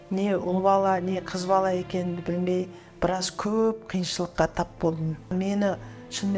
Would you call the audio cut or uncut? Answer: cut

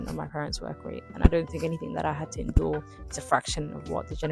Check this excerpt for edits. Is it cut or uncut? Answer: uncut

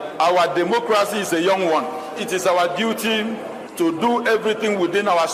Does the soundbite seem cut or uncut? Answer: cut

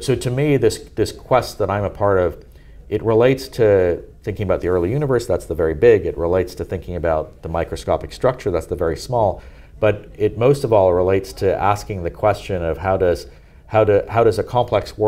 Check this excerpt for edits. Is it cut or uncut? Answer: uncut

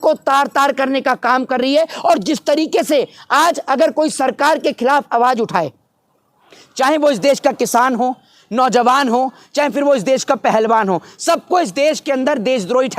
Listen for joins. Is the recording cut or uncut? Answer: uncut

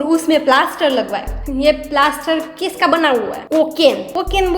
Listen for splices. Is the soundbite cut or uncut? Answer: cut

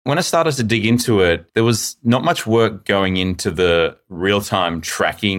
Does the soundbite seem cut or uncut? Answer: cut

